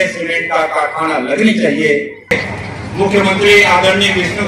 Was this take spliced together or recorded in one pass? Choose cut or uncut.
cut